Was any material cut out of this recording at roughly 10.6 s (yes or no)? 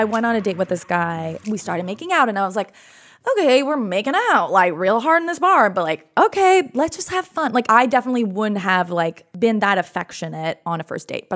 yes